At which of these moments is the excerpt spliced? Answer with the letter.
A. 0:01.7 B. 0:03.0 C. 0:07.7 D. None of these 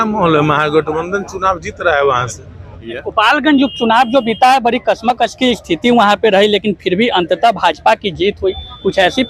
B